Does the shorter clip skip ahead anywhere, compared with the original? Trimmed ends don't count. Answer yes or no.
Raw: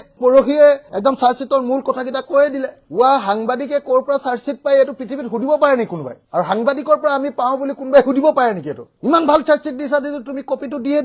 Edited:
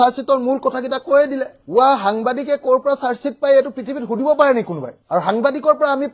no